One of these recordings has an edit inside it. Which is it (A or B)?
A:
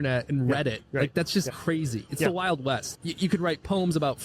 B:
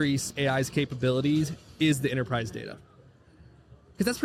A